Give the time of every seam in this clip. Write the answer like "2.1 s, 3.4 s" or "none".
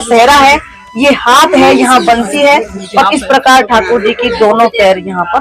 none